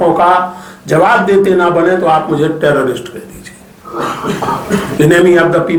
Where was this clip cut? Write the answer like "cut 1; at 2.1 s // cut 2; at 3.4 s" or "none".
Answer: none